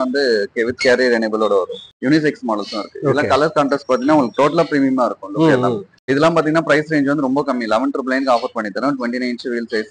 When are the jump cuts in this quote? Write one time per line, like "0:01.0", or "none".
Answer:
0:01.8
0:05.9